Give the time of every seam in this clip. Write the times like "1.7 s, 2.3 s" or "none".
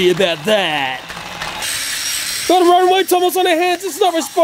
1.6 s